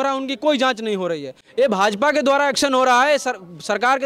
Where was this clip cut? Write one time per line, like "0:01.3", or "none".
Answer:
0:01.4